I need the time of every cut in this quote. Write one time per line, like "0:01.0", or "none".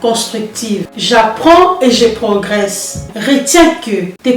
0:00.8
0:03.1